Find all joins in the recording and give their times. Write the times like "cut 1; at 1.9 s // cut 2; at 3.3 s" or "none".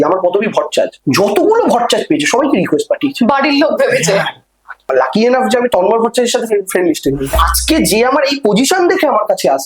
cut 1; at 4.8 s // cut 2; at 7.3 s